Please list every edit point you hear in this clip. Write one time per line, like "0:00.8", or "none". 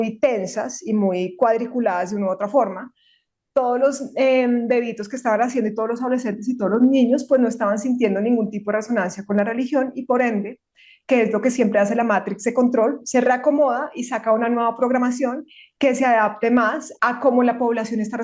0:16.9